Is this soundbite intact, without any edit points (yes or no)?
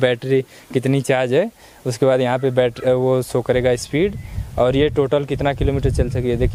yes